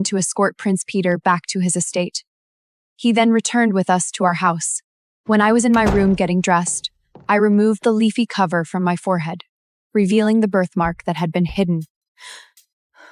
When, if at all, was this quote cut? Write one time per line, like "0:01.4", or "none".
0:12.0